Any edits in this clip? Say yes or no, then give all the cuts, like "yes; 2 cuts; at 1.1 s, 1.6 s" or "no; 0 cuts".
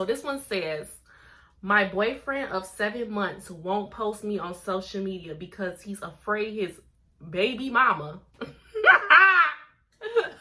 no; 0 cuts